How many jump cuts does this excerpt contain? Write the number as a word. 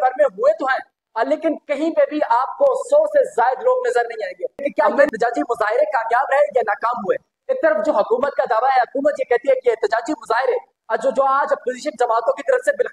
one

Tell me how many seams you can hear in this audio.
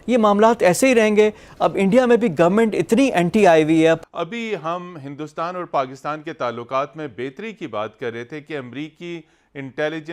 one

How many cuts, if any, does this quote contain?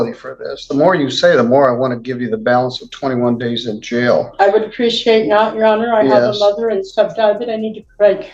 zero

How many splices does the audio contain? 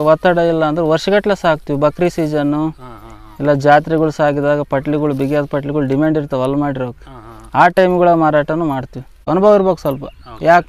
one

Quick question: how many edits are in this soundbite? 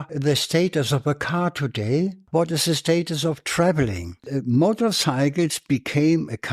two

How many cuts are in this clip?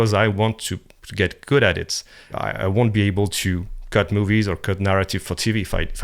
one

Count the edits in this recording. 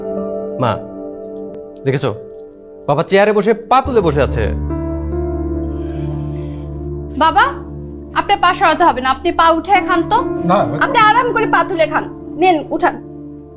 one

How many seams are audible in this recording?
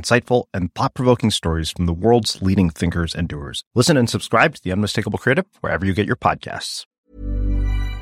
one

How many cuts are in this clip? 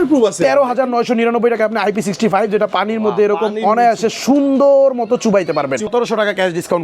one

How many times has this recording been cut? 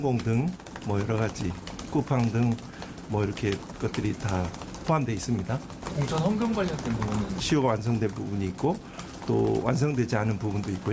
two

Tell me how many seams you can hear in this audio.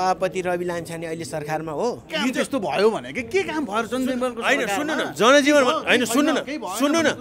one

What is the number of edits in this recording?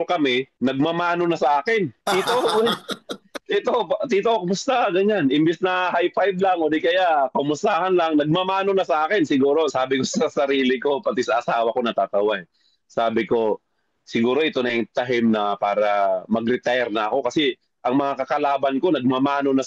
zero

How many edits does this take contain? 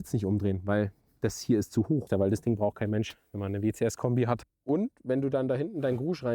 two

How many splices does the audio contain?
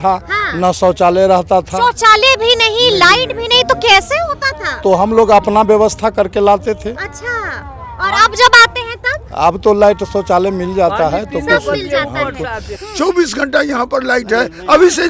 one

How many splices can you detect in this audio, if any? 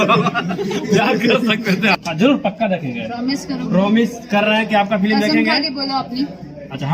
one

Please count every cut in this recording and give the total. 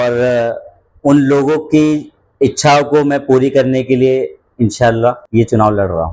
one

